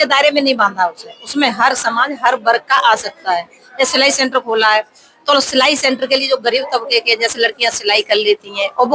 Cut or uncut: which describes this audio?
uncut